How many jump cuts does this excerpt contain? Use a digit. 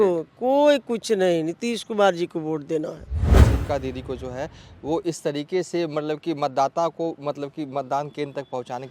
1